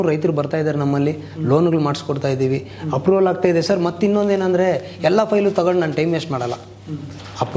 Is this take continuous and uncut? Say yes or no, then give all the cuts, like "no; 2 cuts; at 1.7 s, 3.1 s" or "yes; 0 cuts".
yes; 0 cuts